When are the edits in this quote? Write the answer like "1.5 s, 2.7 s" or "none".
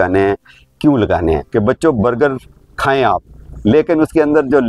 1.5 s